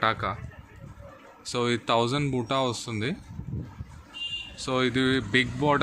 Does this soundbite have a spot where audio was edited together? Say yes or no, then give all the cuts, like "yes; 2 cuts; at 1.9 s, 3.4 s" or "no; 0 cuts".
no; 0 cuts